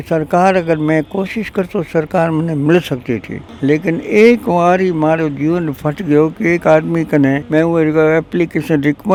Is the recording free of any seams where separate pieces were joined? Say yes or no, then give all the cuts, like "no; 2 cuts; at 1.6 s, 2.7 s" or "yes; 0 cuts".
yes; 0 cuts